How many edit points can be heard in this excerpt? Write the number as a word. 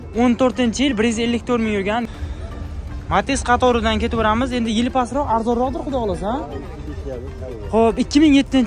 one